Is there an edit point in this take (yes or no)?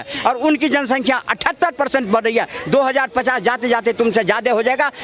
no